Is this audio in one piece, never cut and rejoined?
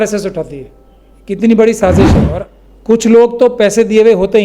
no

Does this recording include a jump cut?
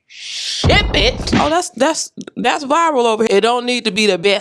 yes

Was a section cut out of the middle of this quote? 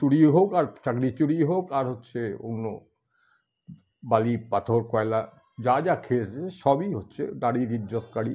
no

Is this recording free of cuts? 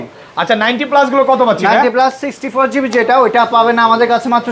yes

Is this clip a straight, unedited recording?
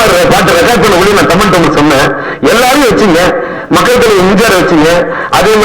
yes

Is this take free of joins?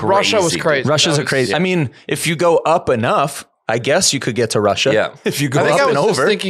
yes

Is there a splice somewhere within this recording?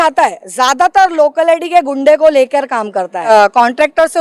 yes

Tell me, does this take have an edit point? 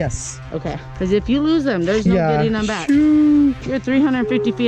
no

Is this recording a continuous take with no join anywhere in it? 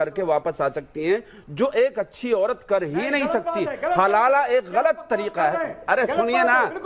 yes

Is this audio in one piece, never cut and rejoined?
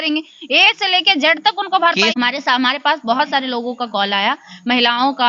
no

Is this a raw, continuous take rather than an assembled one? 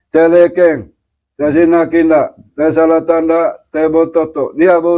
yes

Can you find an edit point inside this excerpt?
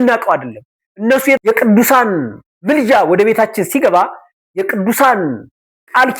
yes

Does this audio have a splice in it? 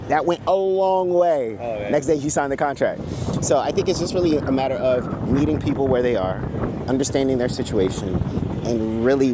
no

